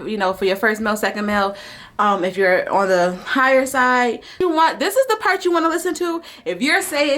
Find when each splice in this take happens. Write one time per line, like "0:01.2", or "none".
0:04.3